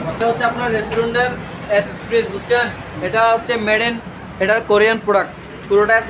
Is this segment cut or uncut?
uncut